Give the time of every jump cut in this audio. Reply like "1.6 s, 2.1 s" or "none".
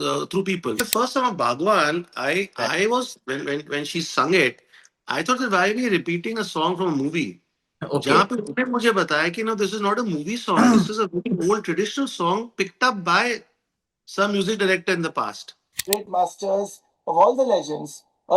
0.8 s, 15.8 s